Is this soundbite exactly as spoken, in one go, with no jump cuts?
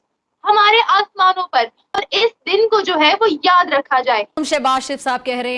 no; 1 cut; at 4.4 s

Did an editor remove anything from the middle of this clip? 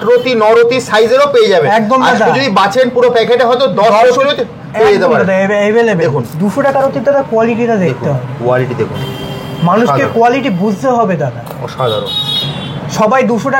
yes; 1 cut; at 6.3 s

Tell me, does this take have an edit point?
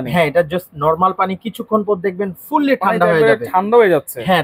no; 0 cuts

